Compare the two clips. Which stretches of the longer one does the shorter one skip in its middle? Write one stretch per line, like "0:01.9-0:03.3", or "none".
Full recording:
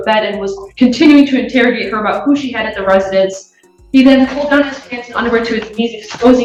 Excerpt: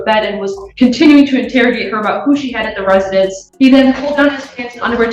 0:03.4-0:03.8